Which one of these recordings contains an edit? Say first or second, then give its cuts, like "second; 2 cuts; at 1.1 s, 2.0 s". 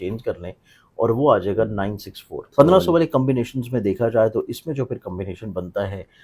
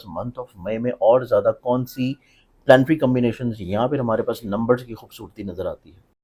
first; 1 cut; at 2.4 s